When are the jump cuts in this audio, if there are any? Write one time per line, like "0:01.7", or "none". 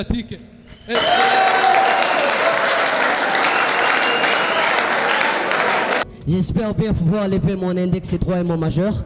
0:06.0